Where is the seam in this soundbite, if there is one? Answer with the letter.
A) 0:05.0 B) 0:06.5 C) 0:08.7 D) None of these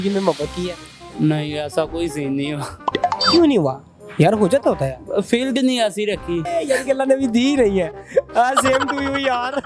B